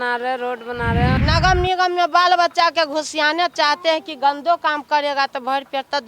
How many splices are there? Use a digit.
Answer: 1